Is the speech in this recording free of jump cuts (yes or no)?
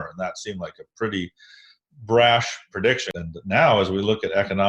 no